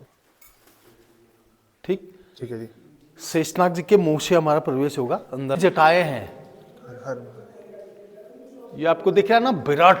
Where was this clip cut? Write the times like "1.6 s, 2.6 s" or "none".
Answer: 5.6 s